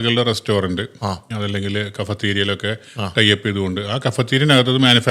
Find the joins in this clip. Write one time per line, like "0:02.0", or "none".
none